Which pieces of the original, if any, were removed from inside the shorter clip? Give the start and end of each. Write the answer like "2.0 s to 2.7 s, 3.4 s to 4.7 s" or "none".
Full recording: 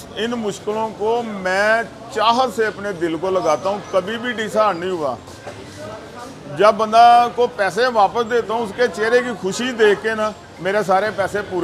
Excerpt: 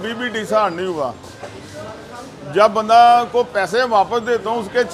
none